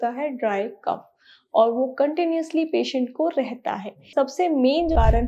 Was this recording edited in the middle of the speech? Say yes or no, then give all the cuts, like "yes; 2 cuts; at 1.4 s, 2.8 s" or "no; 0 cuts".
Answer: yes; 1 cut; at 4.0 s